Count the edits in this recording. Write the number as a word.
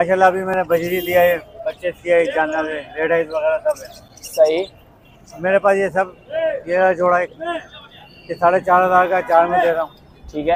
zero